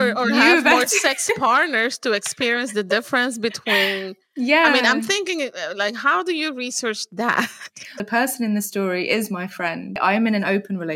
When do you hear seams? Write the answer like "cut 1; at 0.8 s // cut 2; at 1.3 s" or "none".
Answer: cut 1; at 8.0 s // cut 2; at 10.0 s